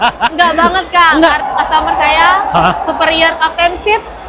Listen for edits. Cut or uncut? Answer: cut